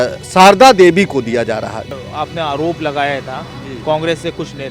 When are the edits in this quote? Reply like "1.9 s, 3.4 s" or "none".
1.9 s